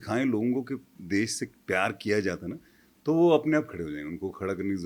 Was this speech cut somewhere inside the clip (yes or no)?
no